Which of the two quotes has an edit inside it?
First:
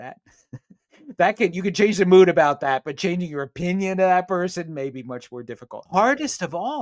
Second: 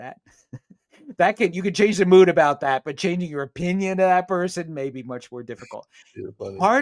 first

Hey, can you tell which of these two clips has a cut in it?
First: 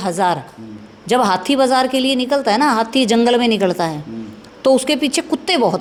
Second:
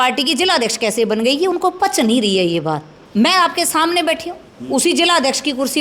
second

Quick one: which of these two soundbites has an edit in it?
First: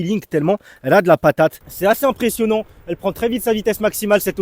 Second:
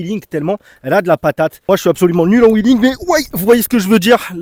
first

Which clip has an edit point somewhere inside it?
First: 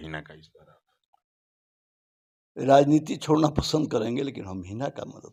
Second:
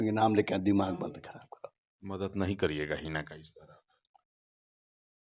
second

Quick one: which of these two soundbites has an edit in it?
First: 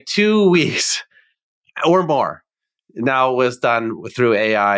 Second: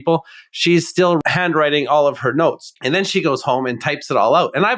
second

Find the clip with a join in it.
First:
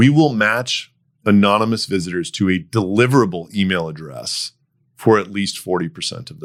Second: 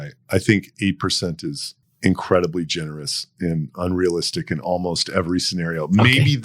second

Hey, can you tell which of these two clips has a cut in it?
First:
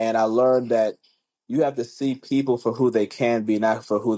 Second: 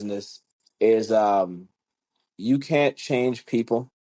second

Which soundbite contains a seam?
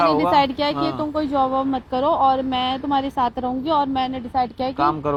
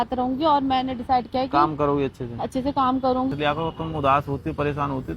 second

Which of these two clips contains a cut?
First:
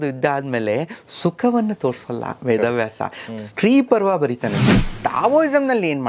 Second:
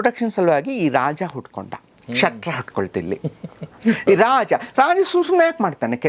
first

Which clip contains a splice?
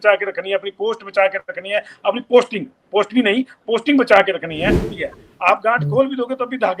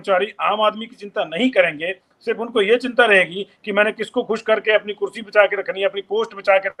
first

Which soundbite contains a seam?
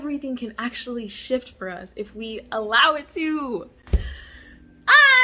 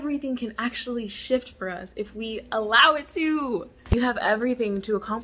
second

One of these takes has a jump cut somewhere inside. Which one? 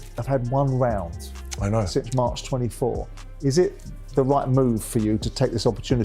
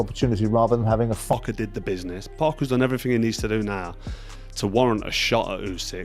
second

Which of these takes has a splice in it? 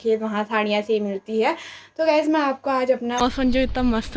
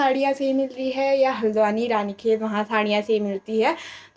first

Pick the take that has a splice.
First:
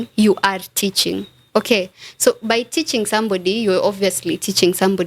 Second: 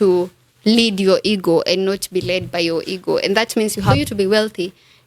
second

